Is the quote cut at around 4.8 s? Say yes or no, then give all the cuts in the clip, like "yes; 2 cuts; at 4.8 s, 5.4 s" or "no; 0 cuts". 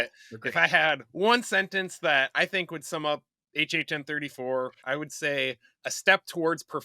yes; 1 cut; at 4.8 s